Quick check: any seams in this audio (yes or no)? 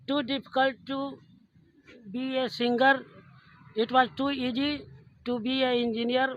no